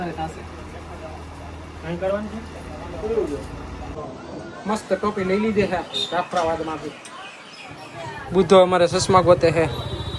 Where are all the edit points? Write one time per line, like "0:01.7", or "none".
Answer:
0:04.0